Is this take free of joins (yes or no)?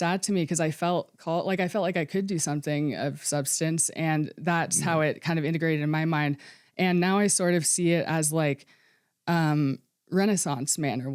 yes